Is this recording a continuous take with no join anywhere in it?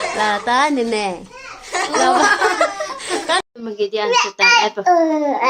no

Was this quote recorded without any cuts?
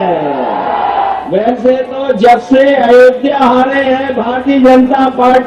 no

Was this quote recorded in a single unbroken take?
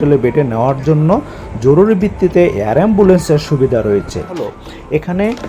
no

